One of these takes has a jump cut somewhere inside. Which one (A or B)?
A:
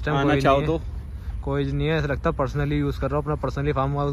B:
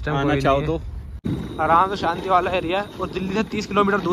B